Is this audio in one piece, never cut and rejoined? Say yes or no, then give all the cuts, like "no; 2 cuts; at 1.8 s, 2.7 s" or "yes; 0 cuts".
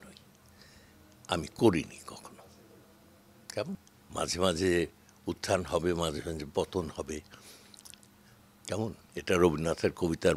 no; 1 cut; at 3.9 s